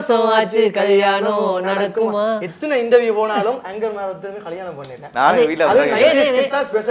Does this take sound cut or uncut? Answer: uncut